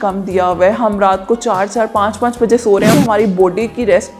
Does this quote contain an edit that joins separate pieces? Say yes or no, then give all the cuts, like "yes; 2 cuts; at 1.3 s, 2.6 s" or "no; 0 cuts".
yes; 1 cut; at 2.9 s